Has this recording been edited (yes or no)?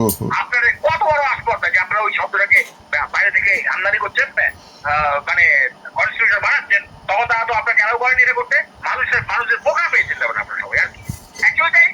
yes